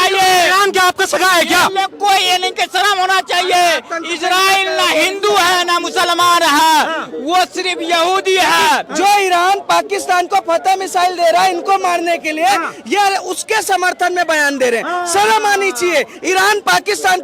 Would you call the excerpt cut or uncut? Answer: cut